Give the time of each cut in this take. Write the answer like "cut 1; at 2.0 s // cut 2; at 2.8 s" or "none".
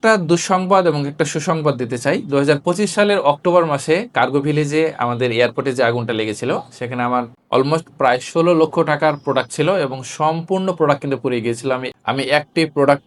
none